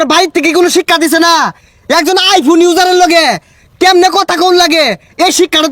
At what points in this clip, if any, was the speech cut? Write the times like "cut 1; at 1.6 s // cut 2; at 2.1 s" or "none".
none